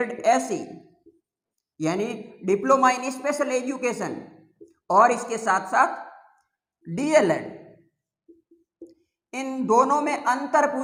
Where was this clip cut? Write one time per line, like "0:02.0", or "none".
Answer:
none